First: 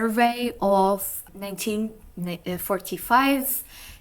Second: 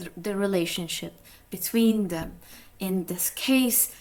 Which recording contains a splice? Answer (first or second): first